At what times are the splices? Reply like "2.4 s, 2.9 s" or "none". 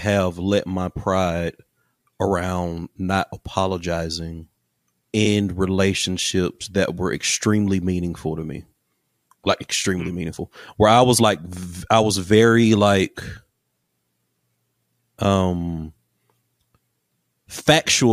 none